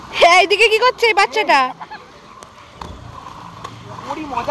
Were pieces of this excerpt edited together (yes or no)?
no